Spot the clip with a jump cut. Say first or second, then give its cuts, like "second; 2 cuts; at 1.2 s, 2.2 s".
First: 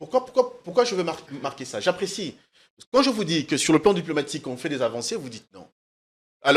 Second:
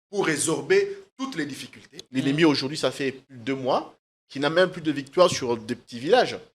second; 1 cut; at 2.0 s